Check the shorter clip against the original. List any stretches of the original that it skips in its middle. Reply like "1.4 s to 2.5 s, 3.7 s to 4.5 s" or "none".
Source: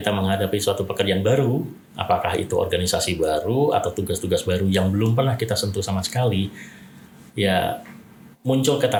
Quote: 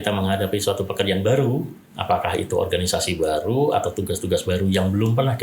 none